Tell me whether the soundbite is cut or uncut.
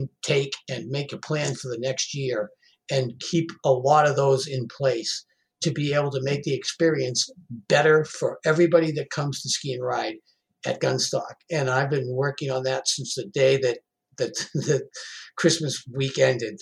uncut